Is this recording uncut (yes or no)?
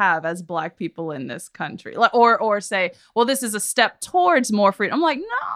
yes